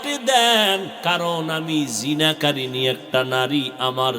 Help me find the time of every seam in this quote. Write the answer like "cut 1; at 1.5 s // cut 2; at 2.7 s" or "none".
cut 1; at 0.9 s